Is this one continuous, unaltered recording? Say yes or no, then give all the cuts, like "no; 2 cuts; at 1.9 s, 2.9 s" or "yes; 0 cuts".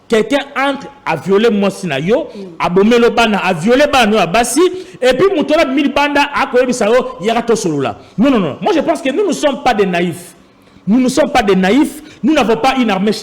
yes; 0 cuts